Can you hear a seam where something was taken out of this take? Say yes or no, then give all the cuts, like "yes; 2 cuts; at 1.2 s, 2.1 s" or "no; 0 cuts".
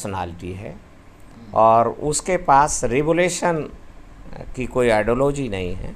no; 0 cuts